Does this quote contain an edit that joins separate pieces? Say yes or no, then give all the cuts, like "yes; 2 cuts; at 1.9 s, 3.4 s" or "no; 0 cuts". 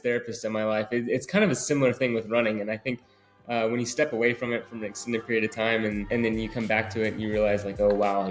yes; 1 cut; at 6.0 s